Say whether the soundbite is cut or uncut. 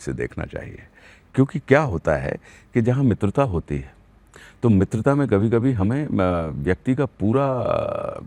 uncut